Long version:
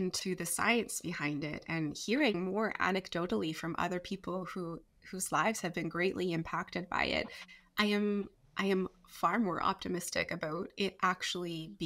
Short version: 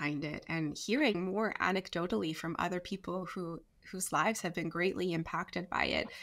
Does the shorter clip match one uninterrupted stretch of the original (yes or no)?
yes